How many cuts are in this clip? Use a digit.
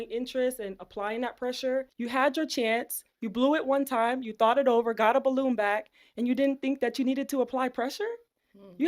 1